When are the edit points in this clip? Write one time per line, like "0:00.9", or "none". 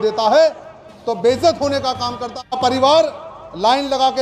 0:02.6